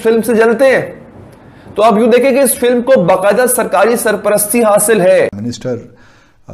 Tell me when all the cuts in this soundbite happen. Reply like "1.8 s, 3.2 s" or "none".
5.5 s